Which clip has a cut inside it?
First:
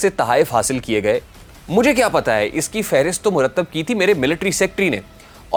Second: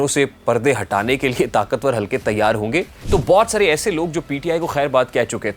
second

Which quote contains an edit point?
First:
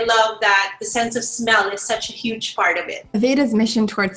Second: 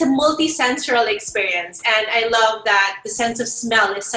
first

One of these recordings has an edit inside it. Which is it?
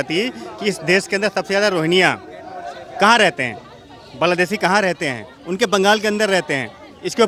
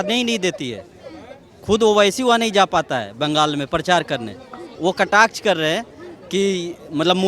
second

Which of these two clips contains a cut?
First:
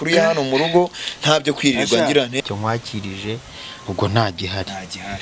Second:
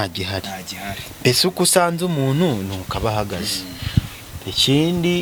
first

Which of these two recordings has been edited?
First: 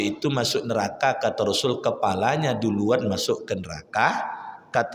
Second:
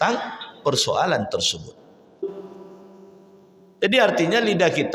second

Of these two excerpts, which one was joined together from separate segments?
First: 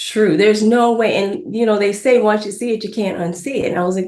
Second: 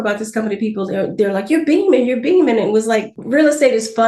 second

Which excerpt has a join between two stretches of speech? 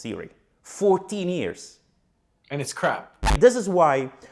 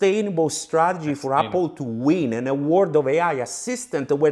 first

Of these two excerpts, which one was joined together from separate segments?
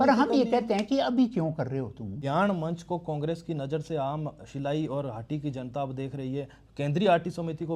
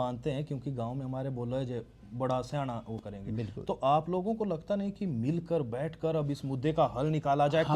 first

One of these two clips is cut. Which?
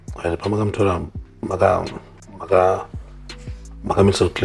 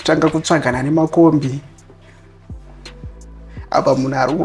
second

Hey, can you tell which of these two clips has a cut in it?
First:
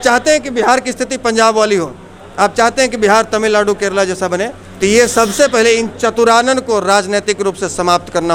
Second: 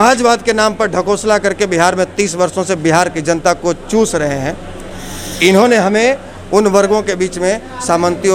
first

